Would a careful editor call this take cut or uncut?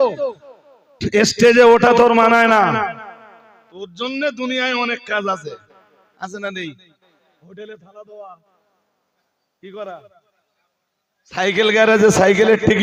uncut